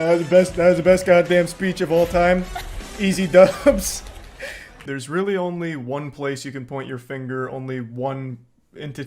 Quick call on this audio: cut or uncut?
cut